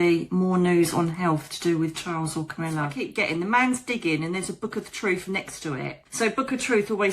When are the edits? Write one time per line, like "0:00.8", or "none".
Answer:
0:02.9
0:06.0